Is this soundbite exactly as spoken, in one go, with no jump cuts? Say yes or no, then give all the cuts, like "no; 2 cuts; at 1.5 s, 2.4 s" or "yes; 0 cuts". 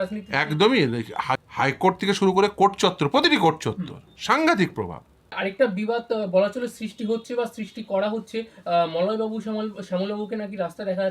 no; 2 cuts; at 1.4 s, 5.4 s